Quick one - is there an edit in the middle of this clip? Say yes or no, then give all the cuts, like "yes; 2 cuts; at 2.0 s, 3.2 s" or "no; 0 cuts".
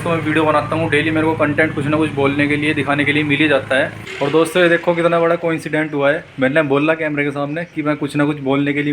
yes; 1 cut; at 4.0 s